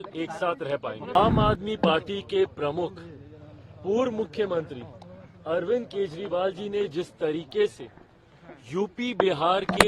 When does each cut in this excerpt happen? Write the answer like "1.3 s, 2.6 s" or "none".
1.2 s

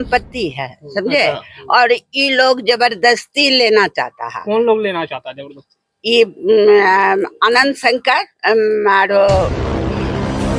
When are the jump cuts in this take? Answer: 9.6 s

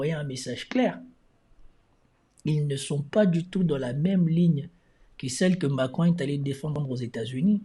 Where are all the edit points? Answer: 6.7 s

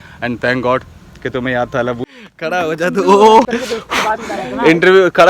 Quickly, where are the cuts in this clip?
2.0 s, 3.5 s

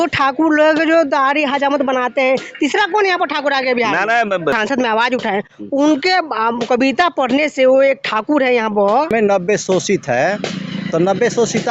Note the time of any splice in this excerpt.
4.6 s, 9.1 s

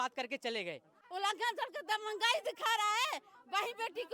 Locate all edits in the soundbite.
1.0 s

